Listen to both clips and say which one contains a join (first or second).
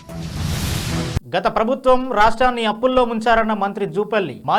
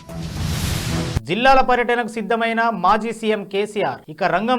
second